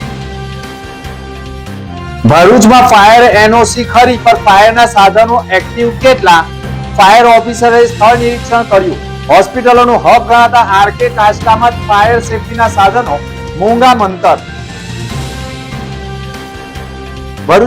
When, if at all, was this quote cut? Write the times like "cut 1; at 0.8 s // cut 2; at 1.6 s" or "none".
cut 1; at 1.7 s